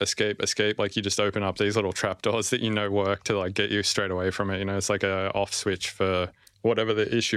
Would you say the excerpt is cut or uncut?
cut